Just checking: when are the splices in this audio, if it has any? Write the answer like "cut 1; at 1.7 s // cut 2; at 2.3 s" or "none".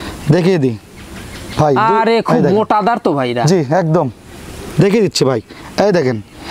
none